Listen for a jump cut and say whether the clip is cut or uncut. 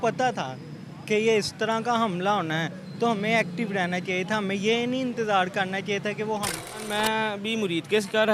cut